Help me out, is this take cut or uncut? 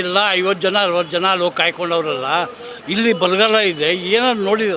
uncut